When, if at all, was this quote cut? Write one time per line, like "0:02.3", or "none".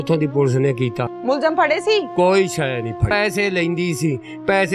0:01.1
0:03.1